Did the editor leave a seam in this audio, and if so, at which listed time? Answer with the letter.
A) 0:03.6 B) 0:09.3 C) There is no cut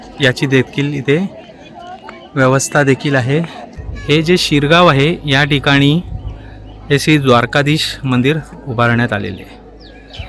A